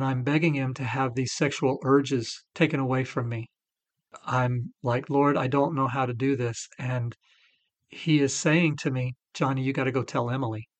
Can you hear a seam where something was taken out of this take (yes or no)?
yes